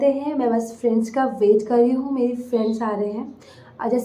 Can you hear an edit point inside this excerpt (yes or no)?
no